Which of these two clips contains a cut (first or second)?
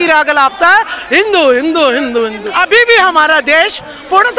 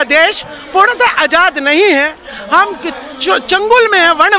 first